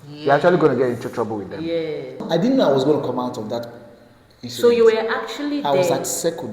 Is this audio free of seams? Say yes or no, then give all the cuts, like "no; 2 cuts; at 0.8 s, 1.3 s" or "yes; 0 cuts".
no; 1 cut; at 2.1 s